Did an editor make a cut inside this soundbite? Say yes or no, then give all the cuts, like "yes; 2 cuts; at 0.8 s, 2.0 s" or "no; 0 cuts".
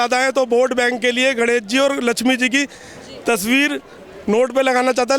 no; 0 cuts